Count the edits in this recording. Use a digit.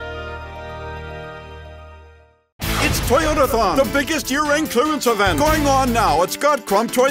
1